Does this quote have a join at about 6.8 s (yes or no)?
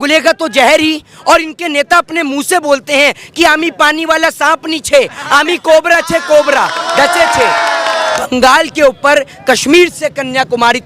yes